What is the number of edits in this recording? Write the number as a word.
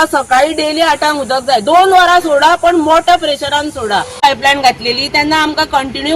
one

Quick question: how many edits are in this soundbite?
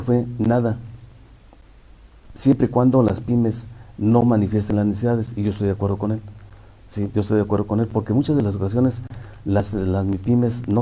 one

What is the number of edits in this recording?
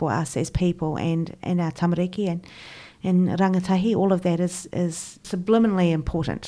one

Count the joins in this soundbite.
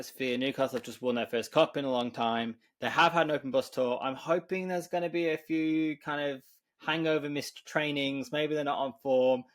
zero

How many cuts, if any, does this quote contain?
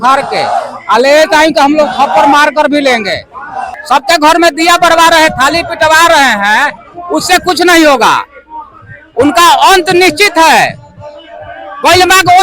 one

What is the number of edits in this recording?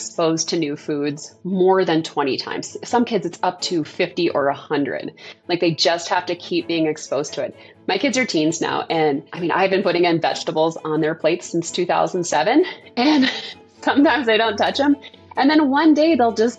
zero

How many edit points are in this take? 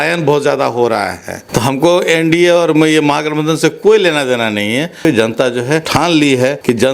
two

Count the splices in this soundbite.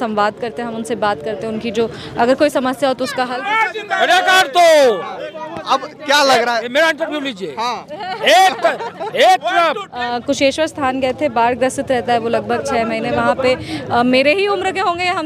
two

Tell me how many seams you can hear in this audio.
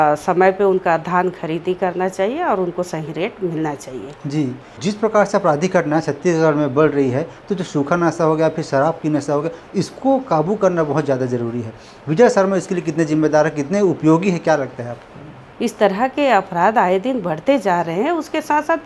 two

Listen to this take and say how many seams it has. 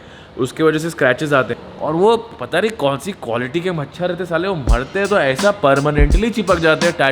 one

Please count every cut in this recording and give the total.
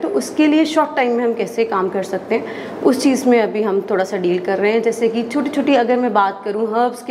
zero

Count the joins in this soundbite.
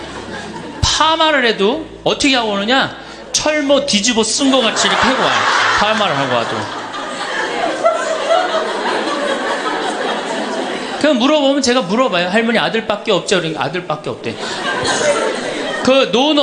one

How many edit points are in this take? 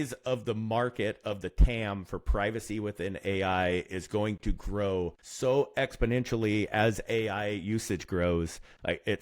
one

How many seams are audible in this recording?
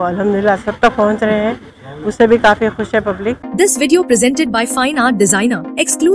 one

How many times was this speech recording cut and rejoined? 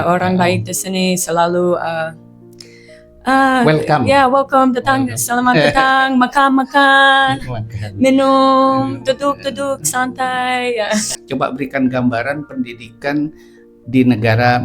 one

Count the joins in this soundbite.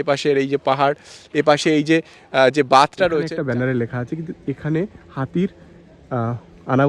one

